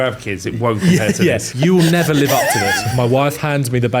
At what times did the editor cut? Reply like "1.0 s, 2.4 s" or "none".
1.5 s, 2.9 s